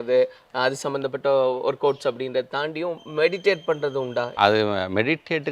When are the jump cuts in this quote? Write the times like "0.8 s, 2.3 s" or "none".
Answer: none